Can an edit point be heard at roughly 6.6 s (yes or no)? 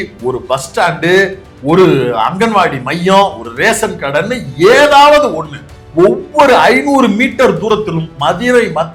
no